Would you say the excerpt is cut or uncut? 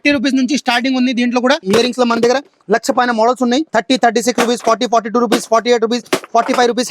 cut